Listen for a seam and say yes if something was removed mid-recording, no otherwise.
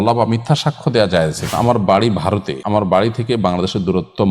yes